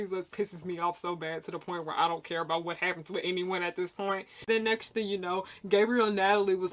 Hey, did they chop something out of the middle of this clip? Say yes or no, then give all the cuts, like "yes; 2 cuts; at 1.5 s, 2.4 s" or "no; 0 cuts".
yes; 1 cut; at 4.3 s